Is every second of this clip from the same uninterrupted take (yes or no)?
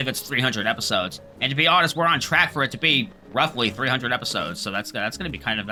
yes